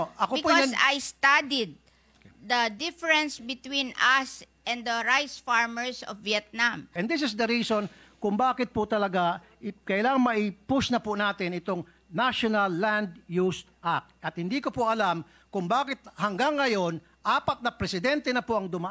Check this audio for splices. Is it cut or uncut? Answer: cut